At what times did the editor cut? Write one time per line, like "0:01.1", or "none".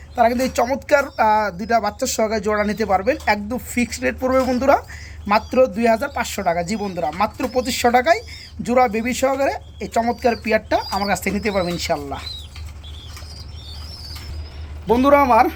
none